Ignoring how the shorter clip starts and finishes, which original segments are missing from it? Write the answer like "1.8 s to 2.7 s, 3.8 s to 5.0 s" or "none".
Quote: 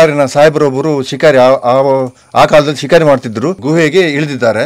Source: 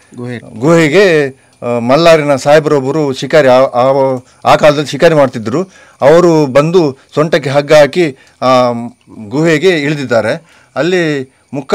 5.7 s to 9.2 s

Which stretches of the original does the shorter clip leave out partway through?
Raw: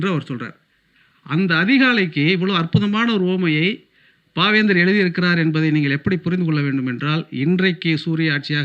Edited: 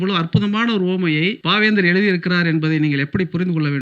3.8 s to 4.3 s

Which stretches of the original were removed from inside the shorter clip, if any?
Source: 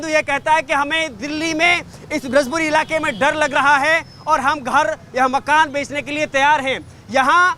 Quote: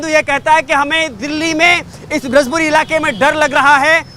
none

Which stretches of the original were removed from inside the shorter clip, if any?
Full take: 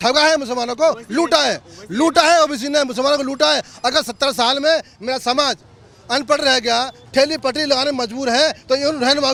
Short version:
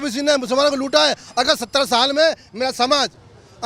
none

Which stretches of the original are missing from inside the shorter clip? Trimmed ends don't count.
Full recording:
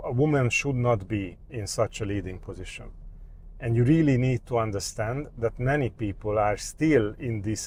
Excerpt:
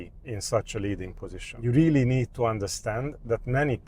2.9 s to 3.8 s

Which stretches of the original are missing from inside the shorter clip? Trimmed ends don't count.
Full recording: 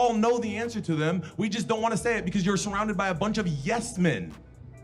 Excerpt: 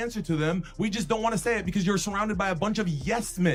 none

